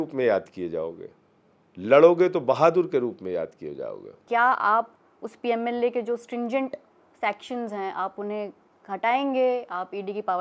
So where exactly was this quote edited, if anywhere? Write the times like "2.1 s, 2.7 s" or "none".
4.2 s